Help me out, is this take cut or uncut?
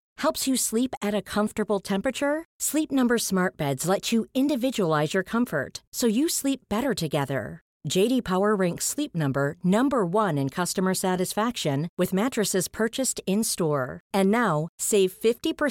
uncut